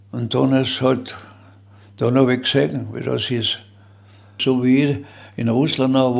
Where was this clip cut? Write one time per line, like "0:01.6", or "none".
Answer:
0:04.4